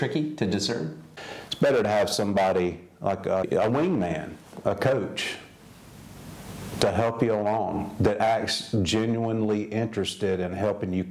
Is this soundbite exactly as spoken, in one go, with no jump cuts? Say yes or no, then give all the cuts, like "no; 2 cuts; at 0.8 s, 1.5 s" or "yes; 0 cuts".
no; 2 cuts; at 1.0 s, 3.5 s